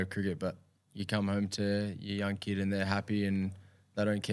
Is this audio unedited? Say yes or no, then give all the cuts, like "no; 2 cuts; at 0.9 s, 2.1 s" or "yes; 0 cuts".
yes; 0 cuts